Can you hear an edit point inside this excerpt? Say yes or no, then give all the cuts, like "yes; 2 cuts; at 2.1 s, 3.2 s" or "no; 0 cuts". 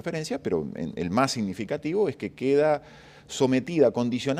yes; 1 cut; at 3.5 s